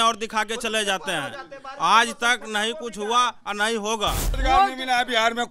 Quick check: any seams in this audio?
yes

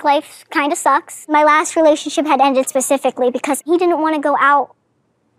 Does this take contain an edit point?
yes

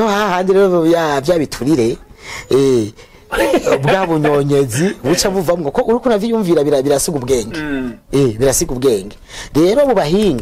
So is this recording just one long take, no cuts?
yes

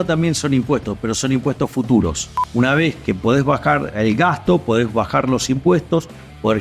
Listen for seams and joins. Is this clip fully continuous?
no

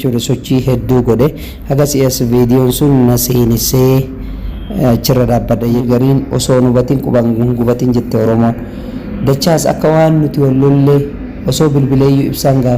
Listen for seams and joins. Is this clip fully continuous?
no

